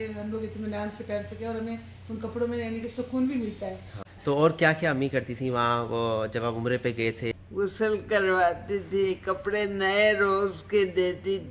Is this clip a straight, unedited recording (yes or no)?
no